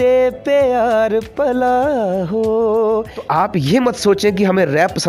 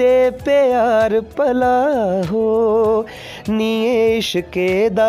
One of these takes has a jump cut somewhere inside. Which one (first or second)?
first